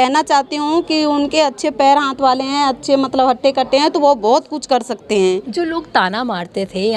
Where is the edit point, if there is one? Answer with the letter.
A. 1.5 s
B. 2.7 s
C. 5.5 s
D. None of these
C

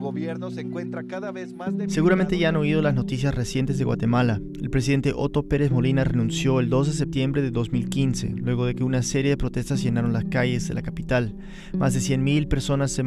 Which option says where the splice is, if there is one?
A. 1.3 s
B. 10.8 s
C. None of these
C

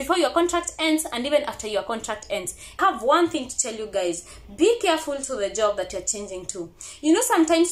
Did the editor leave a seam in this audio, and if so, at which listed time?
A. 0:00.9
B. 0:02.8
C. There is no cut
B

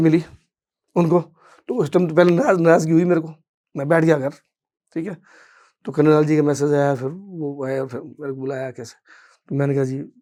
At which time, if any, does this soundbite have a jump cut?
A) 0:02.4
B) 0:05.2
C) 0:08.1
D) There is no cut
D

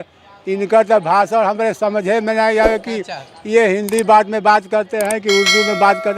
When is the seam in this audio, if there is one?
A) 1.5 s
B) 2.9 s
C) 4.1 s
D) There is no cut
D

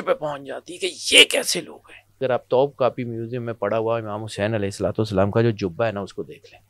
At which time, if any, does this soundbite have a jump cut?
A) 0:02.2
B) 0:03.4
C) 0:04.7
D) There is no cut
A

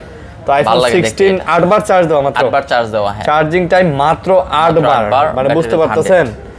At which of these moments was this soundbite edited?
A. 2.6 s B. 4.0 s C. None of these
C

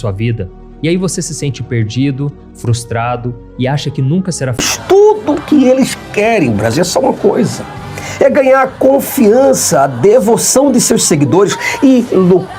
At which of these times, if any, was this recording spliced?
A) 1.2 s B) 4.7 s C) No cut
B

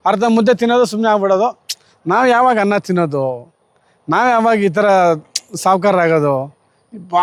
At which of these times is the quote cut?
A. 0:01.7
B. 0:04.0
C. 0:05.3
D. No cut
D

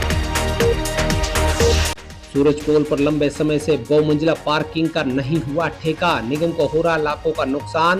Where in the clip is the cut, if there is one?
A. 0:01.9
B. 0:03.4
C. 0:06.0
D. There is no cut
A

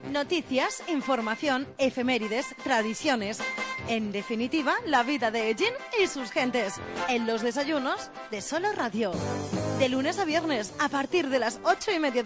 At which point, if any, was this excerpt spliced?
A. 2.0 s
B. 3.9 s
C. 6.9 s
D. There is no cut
D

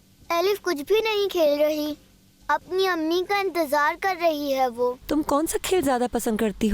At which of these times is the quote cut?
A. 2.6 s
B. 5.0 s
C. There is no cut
B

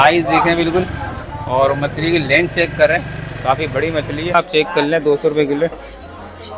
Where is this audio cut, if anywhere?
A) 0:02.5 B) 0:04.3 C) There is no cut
B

